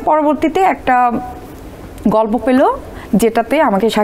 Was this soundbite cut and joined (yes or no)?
no